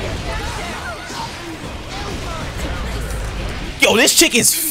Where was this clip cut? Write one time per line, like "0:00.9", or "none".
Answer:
none